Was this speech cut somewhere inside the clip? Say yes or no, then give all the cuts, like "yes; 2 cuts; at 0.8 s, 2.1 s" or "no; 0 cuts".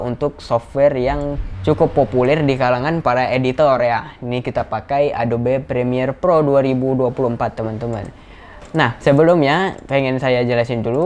no; 0 cuts